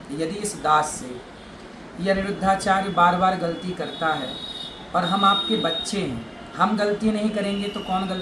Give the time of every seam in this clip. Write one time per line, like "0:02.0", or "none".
none